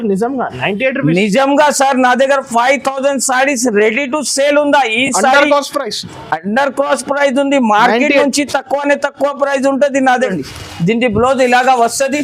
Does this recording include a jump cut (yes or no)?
yes